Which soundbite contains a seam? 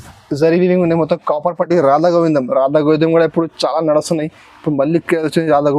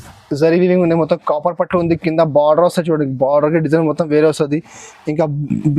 first; 1 cut; at 1.7 s

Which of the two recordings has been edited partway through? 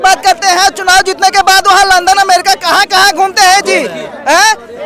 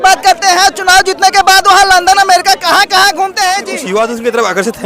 second; 1 cut; at 3.7 s

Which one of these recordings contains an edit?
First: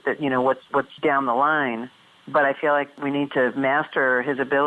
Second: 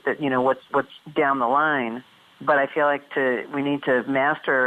first; 2 cuts; at 0.9 s, 2.9 s

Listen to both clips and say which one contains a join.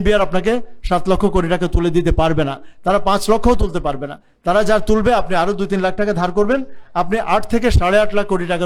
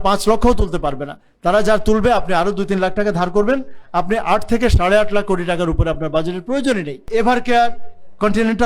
second; 1 cut; at 7.0 s

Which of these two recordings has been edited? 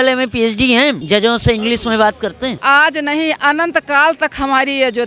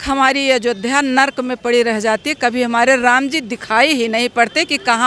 first; 2 cuts; at 1.0 s, 2.6 s

